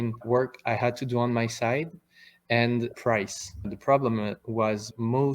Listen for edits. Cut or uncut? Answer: uncut